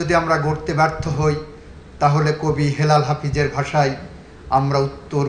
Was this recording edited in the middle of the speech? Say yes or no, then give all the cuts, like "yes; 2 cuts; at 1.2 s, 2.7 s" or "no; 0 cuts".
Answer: no; 0 cuts